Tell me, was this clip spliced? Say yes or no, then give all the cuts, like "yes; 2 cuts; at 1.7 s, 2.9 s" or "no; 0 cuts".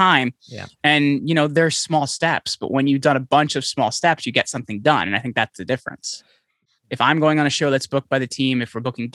yes; 1 cut; at 6.6 s